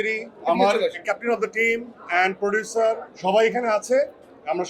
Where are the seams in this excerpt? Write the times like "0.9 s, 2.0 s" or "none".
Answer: 1.0 s, 3.1 s